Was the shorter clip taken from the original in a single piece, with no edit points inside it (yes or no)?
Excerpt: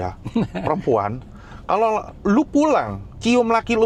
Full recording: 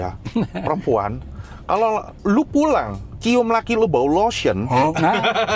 yes